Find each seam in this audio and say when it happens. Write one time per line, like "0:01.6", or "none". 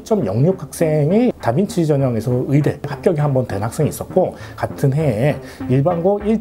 0:01.4